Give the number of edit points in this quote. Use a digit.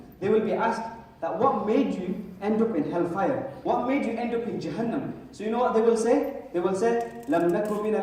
0